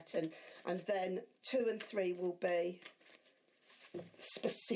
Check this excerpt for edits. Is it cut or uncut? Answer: uncut